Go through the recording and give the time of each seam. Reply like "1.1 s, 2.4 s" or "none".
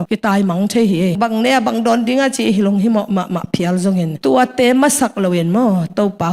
1.1 s